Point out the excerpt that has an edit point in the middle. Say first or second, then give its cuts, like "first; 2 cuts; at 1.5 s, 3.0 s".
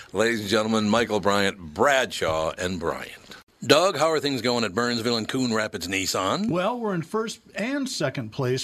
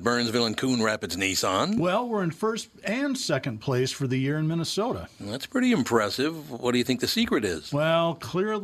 first; 1 cut; at 3.4 s